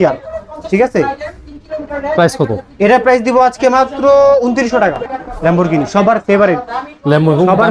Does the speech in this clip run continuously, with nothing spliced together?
no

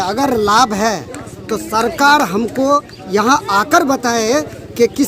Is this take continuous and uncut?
yes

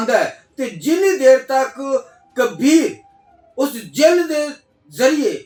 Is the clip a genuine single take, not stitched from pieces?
yes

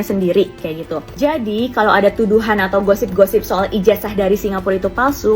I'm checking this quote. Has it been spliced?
yes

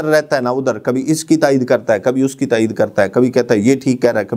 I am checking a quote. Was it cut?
no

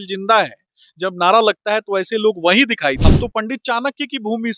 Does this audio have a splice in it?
yes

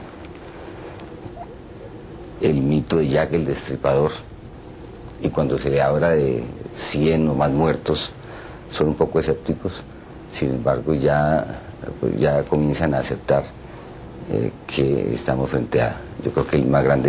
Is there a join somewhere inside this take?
no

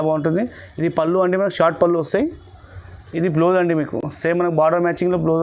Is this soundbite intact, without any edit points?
yes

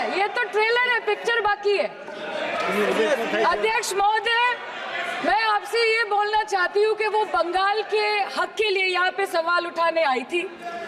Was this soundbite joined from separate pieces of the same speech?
no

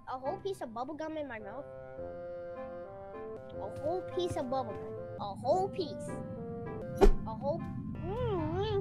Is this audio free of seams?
no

